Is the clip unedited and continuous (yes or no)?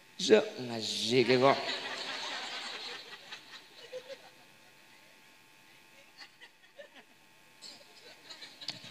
no